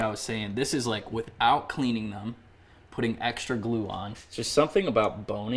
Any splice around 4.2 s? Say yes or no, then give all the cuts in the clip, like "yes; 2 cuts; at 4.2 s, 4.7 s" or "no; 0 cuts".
yes; 1 cut; at 4.2 s